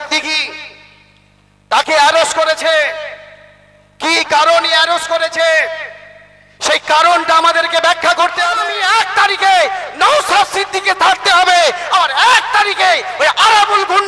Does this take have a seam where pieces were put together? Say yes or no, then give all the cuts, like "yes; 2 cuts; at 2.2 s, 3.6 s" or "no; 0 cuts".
yes; 1 cut; at 8.7 s